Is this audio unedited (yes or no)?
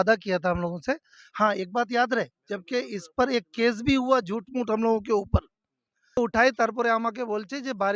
no